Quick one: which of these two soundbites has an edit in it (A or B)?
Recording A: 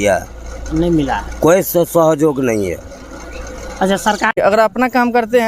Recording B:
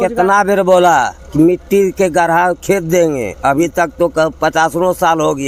A